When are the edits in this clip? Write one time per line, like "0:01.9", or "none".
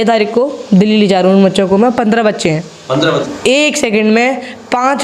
0:03.3